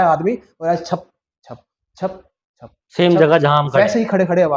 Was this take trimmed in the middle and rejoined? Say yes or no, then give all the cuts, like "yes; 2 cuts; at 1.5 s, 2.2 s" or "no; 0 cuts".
no; 0 cuts